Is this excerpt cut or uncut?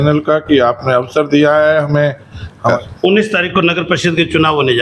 cut